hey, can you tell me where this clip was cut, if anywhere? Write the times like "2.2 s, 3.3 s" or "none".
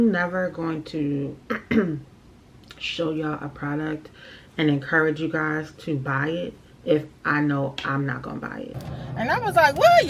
8.7 s